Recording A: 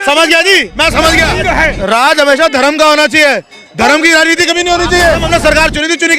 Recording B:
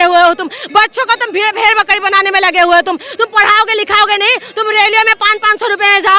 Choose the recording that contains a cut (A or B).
A